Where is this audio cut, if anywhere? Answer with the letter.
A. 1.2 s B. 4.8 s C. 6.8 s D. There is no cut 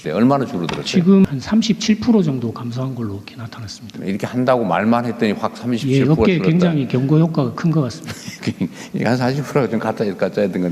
A